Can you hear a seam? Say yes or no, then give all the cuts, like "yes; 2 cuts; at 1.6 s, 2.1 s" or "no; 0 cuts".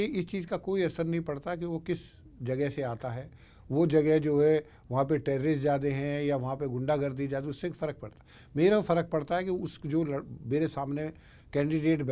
no; 0 cuts